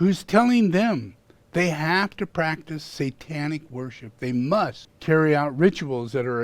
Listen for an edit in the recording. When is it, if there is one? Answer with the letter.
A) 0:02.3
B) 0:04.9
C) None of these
B